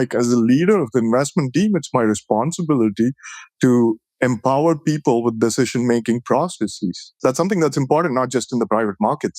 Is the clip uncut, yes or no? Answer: no